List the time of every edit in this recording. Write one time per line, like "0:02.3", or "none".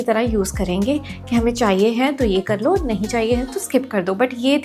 none